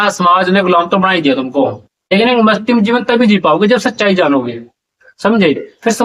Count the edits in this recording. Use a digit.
1